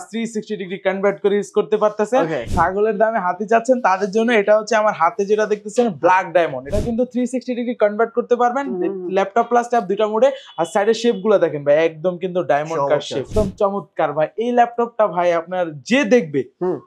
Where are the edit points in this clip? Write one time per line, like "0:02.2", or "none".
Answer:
0:02.5
0:06.6
0:13.3